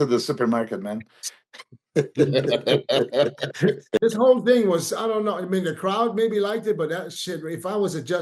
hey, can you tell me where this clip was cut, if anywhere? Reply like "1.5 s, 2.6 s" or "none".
4.0 s